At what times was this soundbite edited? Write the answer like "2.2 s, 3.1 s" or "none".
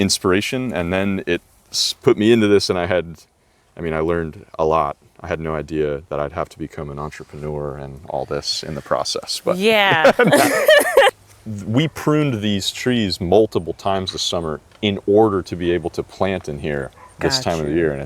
11.1 s